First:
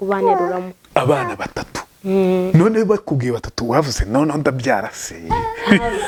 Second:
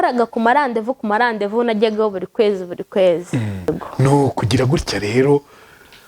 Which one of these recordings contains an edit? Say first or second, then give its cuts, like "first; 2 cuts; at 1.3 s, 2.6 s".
second; 1 cut; at 3.7 s